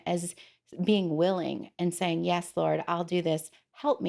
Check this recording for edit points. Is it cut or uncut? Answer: uncut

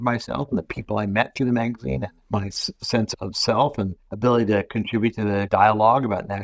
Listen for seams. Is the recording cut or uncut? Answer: uncut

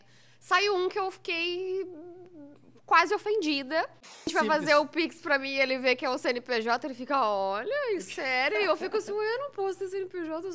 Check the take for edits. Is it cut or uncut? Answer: cut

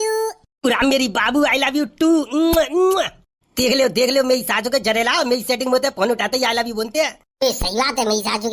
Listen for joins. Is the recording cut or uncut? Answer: uncut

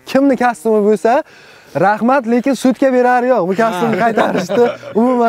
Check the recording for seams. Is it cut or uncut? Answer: uncut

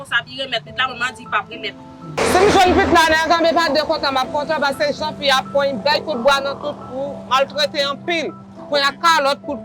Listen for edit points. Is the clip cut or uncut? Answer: cut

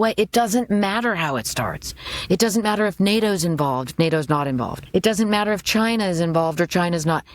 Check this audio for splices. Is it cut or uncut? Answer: cut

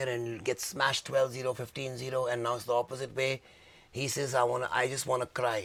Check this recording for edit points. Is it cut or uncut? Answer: uncut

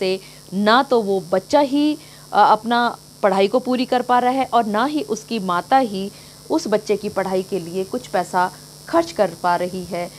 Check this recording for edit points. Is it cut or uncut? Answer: uncut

